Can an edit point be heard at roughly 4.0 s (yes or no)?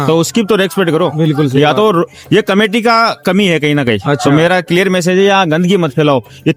no